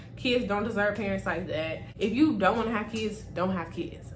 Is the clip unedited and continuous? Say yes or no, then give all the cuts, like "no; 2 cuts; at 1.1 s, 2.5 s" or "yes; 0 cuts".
no; 1 cut; at 1.8 s